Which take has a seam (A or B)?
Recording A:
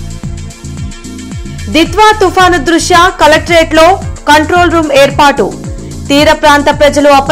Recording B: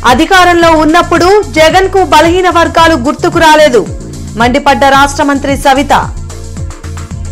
A